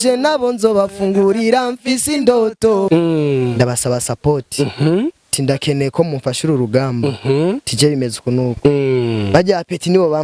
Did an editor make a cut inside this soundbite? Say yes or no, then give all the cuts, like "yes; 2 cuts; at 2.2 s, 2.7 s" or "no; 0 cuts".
yes; 1 cut; at 2.9 s